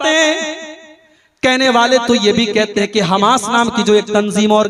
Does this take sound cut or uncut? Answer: uncut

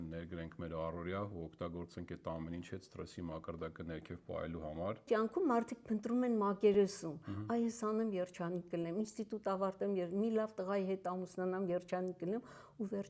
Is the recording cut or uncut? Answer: cut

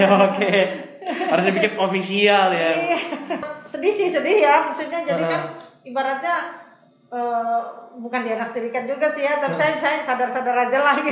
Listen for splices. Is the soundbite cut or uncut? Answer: cut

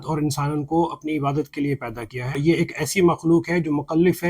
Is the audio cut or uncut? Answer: cut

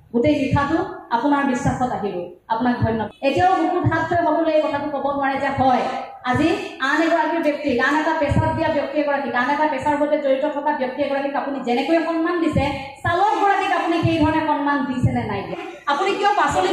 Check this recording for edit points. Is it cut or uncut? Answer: cut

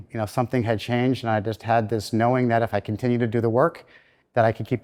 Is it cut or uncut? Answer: uncut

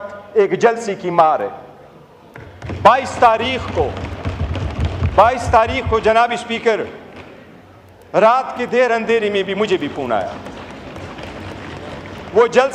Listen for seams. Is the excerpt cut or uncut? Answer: uncut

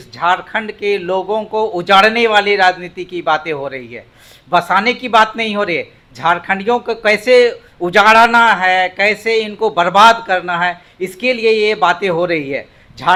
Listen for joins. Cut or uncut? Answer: uncut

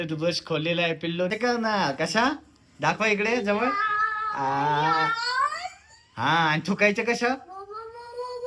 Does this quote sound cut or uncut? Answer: cut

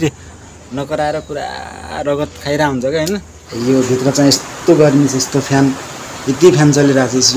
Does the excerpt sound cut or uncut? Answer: cut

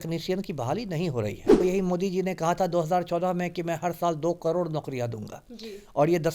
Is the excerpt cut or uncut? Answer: cut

